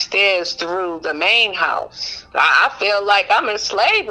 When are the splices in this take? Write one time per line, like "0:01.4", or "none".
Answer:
none